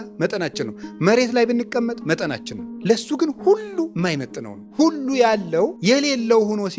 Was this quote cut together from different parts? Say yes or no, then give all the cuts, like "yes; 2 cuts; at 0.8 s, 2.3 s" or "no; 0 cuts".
no; 0 cuts